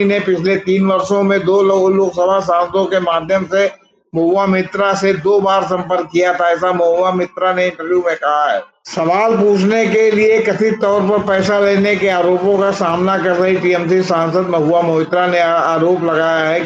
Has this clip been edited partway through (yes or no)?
yes